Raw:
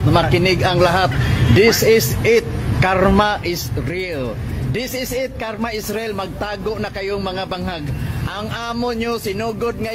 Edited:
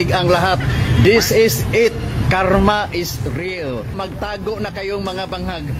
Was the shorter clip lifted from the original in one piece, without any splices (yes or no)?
no